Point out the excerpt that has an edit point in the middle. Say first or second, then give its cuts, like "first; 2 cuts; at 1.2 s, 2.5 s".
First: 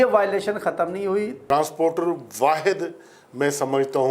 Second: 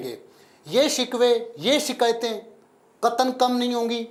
first; 1 cut; at 1.4 s